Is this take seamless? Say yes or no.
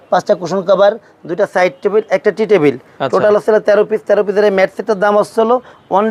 yes